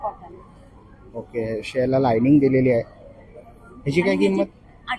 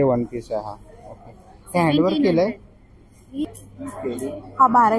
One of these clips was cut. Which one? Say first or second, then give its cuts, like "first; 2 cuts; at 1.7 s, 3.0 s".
second; 1 cut; at 3.5 s